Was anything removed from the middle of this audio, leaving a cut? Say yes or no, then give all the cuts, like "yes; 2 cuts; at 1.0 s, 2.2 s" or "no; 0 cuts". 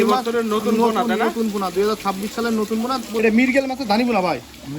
yes; 1 cut; at 3.2 s